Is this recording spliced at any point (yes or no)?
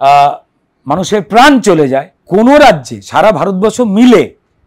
yes